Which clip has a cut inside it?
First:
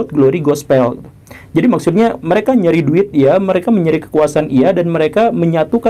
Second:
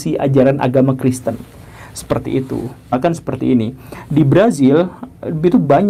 second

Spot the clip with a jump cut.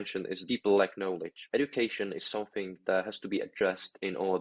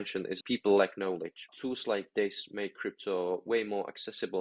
second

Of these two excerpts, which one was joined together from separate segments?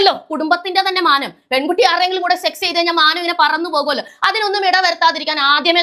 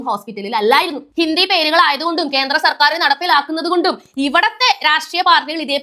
second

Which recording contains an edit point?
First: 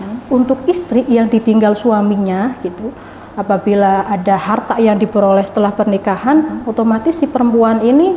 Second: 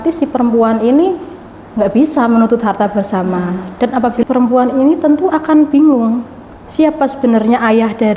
second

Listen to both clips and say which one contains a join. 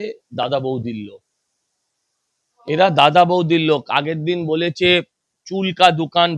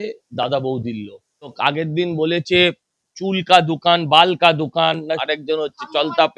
second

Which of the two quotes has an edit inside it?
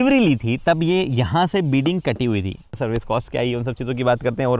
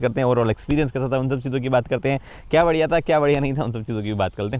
first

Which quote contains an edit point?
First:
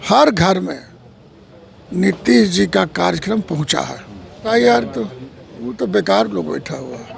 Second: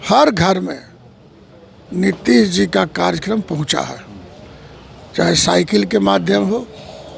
first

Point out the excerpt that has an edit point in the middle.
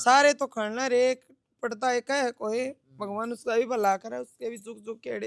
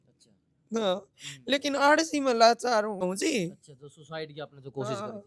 second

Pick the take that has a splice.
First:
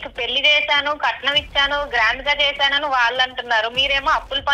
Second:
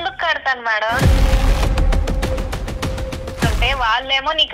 second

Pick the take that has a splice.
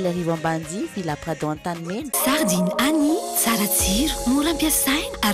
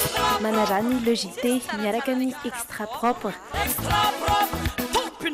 first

